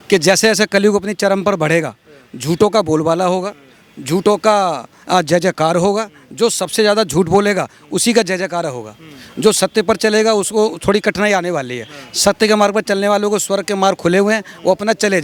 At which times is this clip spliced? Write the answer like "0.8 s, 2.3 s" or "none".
none